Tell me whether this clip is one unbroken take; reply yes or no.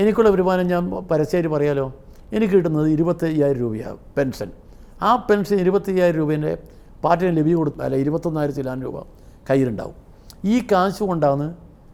yes